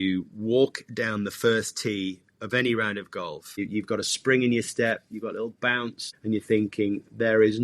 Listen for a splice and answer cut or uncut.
cut